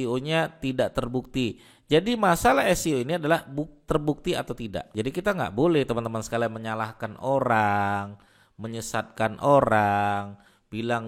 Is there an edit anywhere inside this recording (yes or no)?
yes